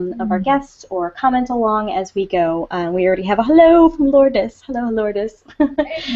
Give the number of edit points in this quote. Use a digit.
1